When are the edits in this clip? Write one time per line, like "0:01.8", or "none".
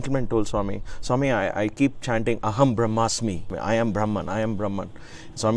0:03.5